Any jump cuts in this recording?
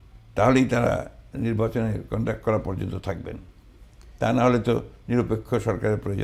no; 0 cuts

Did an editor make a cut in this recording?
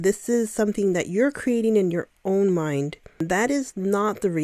yes; 1 cut; at 3.2 s

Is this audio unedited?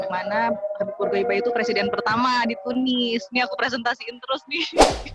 yes; 0 cuts

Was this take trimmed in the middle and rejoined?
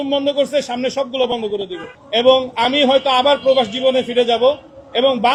no; 0 cuts

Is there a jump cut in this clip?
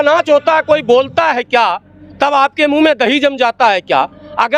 no; 0 cuts

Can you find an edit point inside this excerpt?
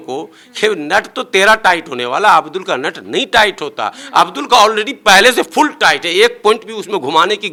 no; 0 cuts

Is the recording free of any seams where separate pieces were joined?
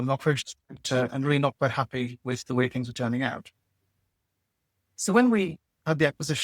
yes; 0 cuts

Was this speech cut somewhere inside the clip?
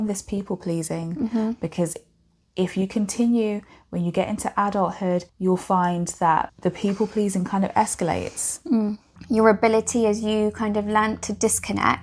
yes; 3 cuts; at 5.3 s, 6.5 s, 9.1 s

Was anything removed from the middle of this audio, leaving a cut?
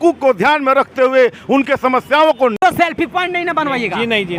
yes; 1 cut; at 2.6 s

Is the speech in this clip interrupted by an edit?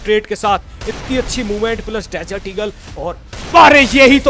no; 0 cuts

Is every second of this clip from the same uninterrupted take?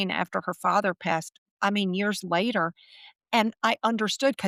yes; 0 cuts

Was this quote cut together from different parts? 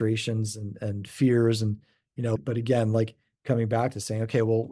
yes; 2 cuts; at 2.4 s, 3.3 s

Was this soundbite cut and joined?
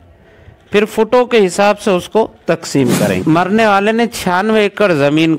yes; 1 cut; at 3.2 s

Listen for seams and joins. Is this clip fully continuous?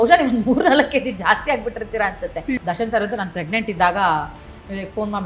no; 1 cut; at 2.6 s

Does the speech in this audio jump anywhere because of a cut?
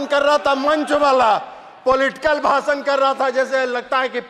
no; 0 cuts

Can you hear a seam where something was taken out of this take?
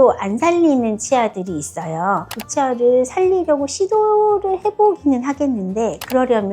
yes; 1 cut; at 2.3 s

